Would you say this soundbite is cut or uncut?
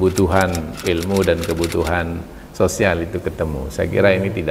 uncut